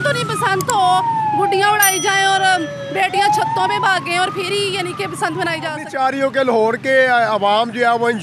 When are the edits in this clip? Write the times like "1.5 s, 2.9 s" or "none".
5.8 s